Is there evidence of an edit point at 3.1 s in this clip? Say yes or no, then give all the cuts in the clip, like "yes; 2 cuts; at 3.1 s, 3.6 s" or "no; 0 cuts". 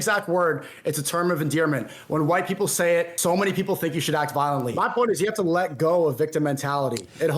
yes; 2 cuts; at 3.1 s, 4.7 s